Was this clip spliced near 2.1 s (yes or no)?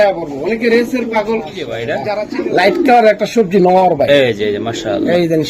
yes